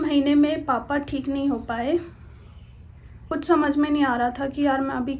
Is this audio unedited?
no; 1 cut; at 3.2 s

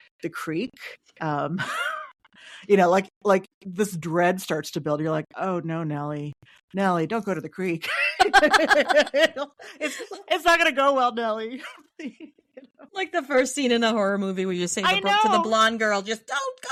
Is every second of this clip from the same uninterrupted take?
yes; 0 cuts

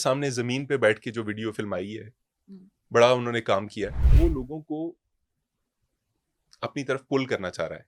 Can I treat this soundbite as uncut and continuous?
no; 1 cut; at 4.0 s

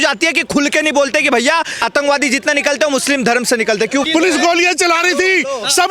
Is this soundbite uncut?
no; 2 cuts; at 1.9 s, 4.0 s

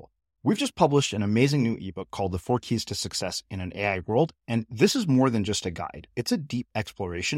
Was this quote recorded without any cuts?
yes; 0 cuts

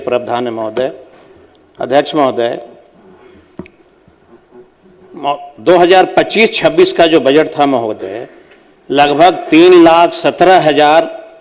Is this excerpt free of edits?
yes; 0 cuts

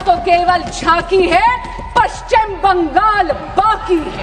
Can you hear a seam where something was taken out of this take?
no; 0 cuts

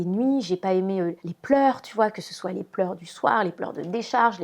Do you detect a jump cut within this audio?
no; 0 cuts

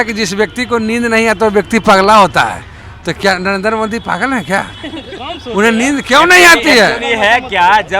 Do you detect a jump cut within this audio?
no; 0 cuts

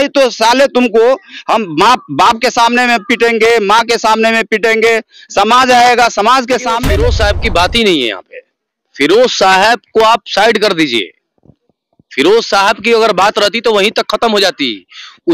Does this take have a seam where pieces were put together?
yes; 1 cut; at 6.9 s

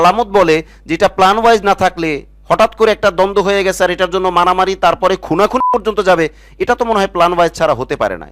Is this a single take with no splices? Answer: yes; 0 cuts

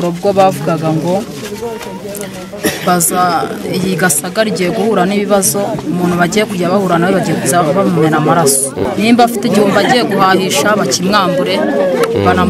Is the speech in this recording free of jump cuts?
yes; 0 cuts

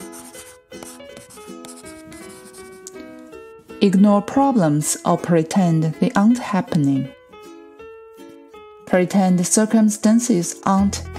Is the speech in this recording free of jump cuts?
no; 1 cut; at 3.8 s

